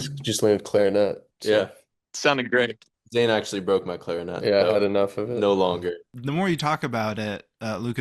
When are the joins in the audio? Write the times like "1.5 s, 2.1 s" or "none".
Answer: 1.7 s, 6.1 s